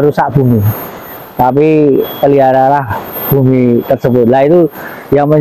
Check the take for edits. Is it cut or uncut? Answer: uncut